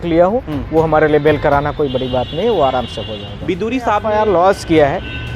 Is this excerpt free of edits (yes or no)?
no